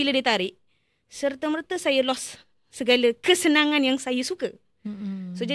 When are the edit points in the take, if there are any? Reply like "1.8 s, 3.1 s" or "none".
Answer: none